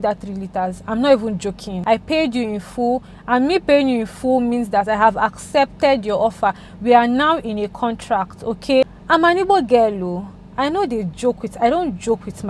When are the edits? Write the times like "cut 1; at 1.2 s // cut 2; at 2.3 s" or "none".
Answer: cut 1; at 1.7 s // cut 2; at 9.0 s